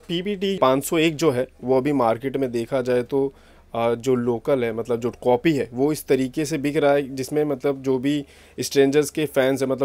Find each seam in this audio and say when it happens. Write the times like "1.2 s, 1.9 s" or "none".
none